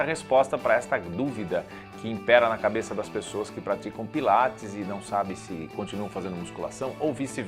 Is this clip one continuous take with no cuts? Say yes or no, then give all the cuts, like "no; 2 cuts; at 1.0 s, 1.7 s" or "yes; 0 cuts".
yes; 0 cuts